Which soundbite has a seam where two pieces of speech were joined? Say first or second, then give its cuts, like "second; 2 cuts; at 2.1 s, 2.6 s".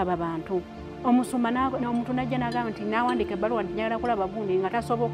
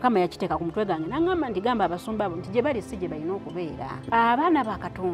second; 1 cut; at 4.0 s